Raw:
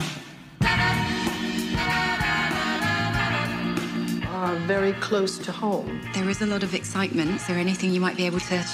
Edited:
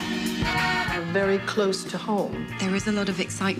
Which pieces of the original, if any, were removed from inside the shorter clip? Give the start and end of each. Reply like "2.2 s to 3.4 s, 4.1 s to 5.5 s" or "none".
2.3 s to 4.5 s